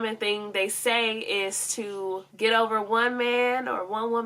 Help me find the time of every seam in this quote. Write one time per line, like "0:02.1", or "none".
none